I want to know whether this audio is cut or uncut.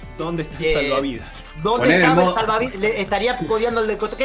uncut